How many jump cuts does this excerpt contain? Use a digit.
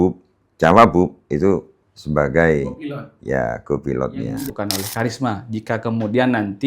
1